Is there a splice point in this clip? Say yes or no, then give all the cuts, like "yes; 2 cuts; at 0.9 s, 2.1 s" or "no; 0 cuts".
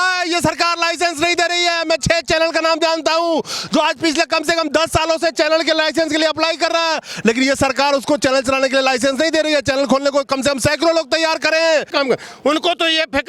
yes; 1 cut; at 11.9 s